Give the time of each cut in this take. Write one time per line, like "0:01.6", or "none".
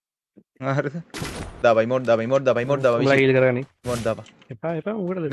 0:01.6